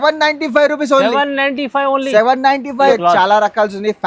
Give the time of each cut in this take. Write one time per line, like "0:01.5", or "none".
0:02.9

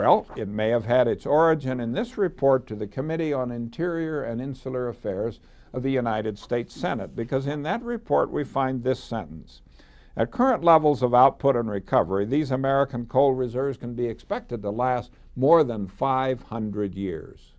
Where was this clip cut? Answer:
none

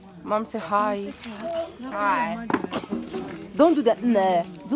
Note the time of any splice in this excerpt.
none

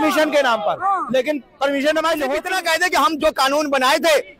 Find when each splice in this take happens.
0:02.4

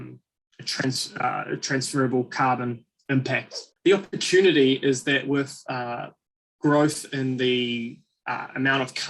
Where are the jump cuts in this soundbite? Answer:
0:03.6

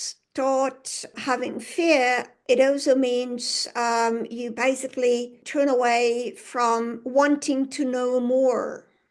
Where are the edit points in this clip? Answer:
0:01.1
0:02.3
0:05.4

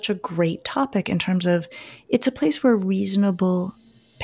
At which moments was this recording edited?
none

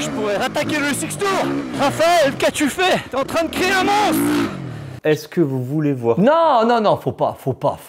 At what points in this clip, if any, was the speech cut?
0:01.7
0:03.1
0:04.9

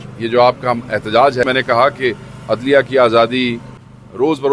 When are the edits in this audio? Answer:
0:01.5
0:03.6

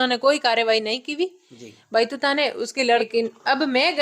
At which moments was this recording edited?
0:03.1

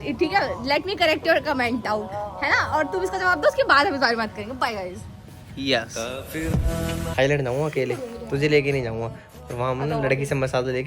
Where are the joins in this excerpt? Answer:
0:07.0

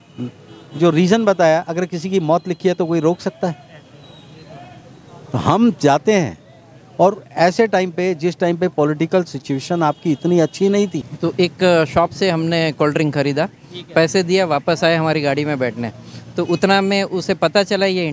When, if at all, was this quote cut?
0:11.0

